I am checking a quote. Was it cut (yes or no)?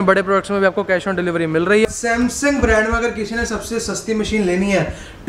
yes